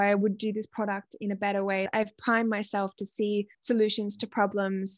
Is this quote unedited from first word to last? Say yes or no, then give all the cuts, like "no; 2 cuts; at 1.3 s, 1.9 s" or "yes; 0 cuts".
no; 2 cuts; at 1.9 s, 3.6 s